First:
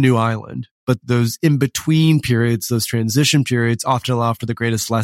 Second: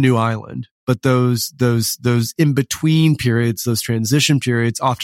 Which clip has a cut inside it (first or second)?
first